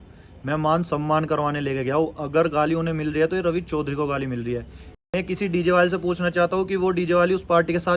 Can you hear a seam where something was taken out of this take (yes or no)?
no